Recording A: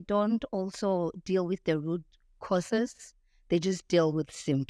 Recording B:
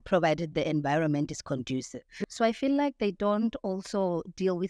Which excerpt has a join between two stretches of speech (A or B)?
B